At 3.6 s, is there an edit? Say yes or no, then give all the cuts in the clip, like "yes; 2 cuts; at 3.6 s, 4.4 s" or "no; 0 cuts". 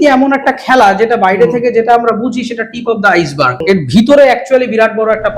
yes; 1 cut; at 3.6 s